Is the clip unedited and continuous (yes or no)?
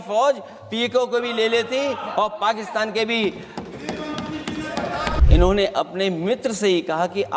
no